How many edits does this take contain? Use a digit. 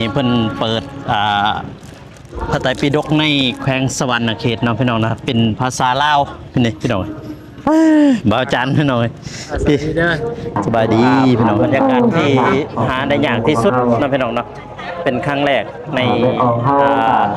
1